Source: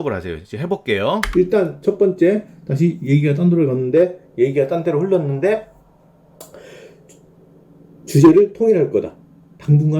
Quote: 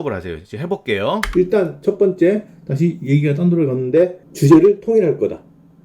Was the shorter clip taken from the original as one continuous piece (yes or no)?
no